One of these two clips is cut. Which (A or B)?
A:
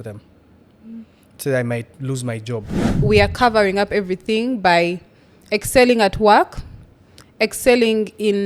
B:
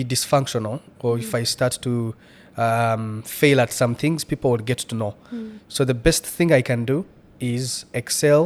A